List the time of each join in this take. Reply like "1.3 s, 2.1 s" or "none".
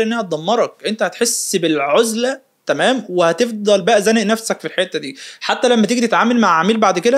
none